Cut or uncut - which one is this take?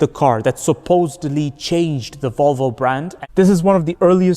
cut